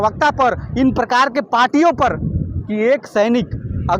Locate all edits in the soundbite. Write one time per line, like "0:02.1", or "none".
0:02.6